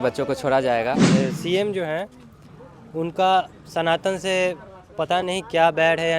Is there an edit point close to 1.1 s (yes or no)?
yes